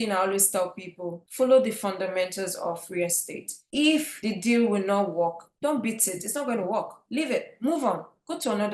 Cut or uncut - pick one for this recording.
uncut